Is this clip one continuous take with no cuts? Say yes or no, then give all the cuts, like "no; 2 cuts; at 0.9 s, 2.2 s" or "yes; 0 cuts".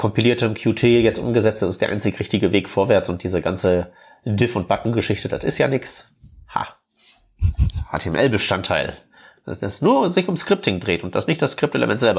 yes; 0 cuts